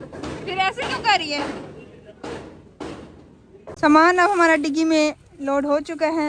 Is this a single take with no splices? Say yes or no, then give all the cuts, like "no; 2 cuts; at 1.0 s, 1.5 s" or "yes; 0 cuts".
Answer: no; 1 cut; at 3.7 s